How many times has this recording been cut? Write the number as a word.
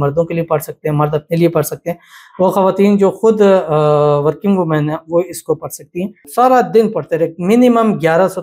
one